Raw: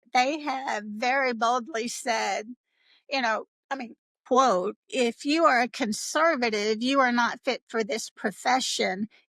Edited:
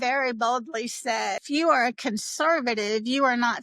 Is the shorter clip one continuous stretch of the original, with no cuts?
no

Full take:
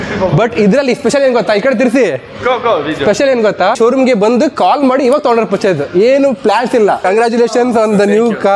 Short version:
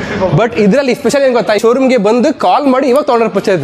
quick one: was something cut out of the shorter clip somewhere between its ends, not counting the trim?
yes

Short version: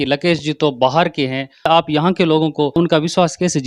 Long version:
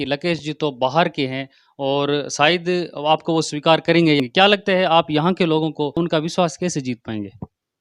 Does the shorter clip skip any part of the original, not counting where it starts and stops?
yes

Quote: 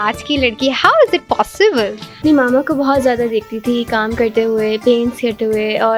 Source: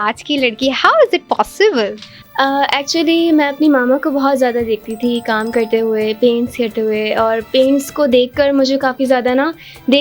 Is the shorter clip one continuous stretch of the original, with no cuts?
no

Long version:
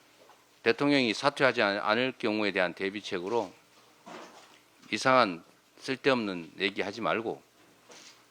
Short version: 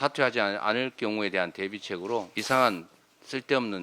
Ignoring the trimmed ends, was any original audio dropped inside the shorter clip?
yes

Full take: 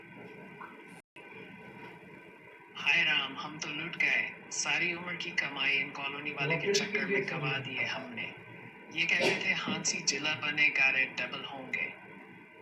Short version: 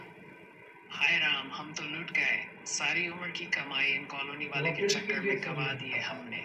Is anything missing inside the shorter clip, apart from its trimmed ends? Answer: no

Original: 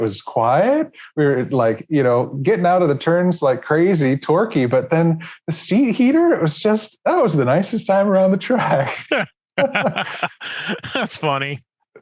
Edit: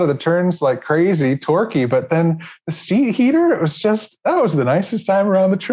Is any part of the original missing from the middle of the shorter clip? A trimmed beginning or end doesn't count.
no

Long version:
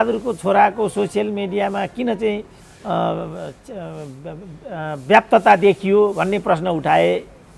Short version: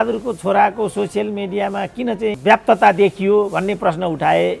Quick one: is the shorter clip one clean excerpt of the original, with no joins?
no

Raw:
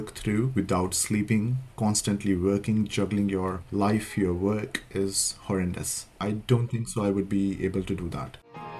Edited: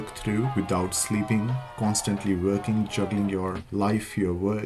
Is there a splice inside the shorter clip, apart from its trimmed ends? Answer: no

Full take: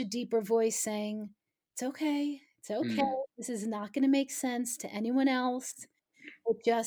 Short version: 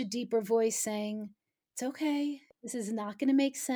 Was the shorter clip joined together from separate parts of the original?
yes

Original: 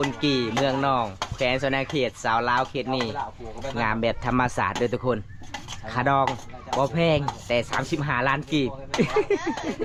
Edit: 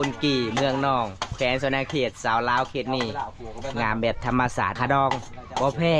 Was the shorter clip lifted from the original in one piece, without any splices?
no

